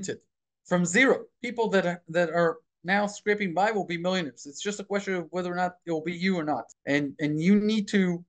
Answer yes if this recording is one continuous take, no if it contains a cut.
no